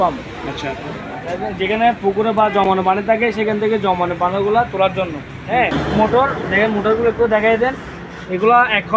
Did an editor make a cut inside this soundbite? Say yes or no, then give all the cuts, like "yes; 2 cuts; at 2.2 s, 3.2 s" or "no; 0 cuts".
yes; 1 cut; at 5.7 s